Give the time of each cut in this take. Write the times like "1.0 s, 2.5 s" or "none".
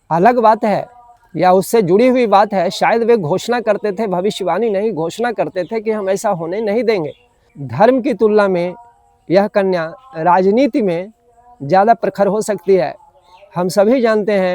7.6 s